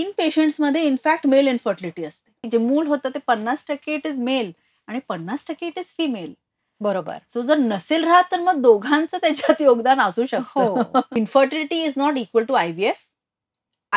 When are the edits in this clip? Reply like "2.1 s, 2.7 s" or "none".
2.4 s, 11.1 s